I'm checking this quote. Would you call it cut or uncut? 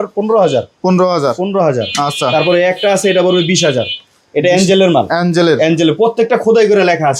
uncut